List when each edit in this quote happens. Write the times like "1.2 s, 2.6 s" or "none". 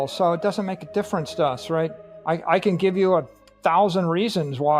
2.1 s